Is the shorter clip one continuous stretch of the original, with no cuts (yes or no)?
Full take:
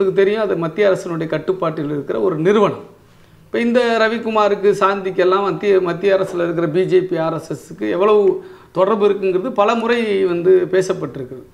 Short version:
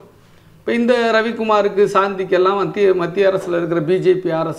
yes